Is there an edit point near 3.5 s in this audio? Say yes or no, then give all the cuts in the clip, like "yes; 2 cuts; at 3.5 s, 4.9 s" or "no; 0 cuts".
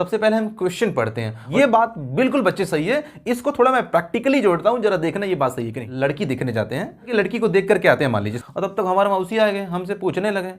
no; 4 cuts; at 1.4 s, 5.8 s, 7.1 s, 8.4 s